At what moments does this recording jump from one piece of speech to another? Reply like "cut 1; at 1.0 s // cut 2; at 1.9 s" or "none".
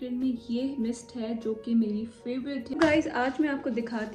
cut 1; at 2.7 s